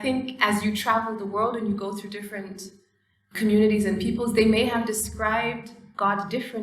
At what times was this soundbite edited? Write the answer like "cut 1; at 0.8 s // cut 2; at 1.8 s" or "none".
cut 1; at 3.4 s

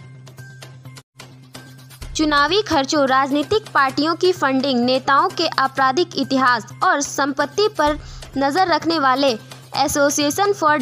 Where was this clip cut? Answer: cut 1; at 0.8 s // cut 2; at 1.9 s

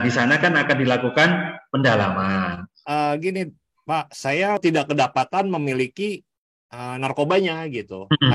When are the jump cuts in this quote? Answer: cut 1; at 2.7 s // cut 2; at 4.6 s

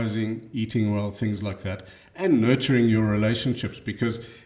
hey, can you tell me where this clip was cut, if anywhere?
none

